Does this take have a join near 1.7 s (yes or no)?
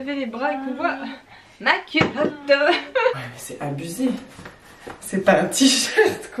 no